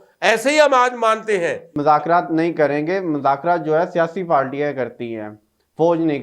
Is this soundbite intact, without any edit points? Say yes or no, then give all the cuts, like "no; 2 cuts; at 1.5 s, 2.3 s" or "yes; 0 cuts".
no; 1 cut; at 1.6 s